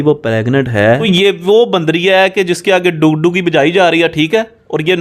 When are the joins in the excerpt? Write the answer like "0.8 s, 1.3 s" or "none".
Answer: 1.0 s